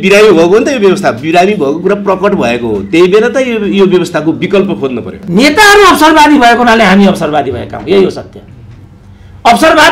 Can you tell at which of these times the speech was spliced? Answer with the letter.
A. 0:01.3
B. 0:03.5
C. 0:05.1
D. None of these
C